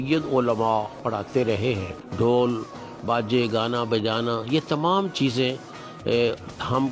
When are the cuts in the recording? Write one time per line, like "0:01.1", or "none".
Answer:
0:02.0